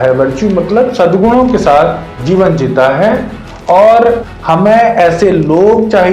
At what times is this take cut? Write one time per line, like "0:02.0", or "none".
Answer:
0:04.2